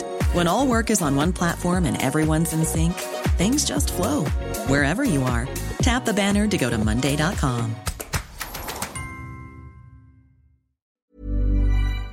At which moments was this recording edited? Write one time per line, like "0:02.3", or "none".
0:10.9